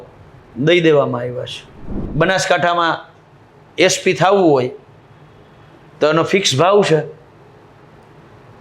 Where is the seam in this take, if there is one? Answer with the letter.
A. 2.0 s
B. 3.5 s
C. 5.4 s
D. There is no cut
A